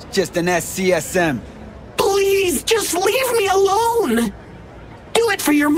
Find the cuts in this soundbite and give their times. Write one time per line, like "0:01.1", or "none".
none